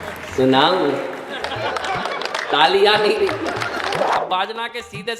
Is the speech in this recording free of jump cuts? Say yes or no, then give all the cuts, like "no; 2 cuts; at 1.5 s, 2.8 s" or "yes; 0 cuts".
no; 1 cut; at 4.2 s